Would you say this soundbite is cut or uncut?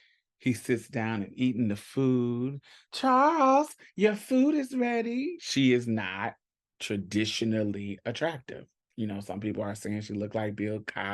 cut